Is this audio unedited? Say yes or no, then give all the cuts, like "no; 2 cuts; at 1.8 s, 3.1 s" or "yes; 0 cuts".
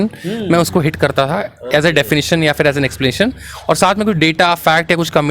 yes; 0 cuts